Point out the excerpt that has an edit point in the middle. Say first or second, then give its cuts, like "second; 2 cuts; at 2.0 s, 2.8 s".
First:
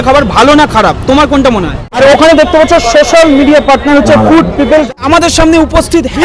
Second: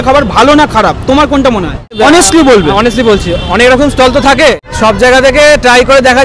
first; 2 cuts; at 1.9 s, 4.9 s